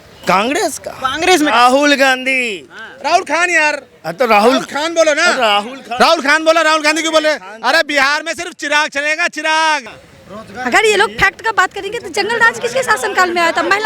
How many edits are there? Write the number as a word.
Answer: one